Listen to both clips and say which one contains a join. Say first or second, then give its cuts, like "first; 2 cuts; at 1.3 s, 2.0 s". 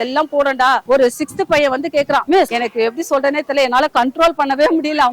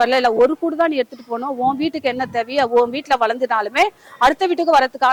first; 2 cuts; at 0.8 s, 2.4 s